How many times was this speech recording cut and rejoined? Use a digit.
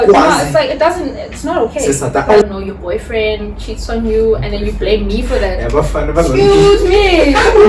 1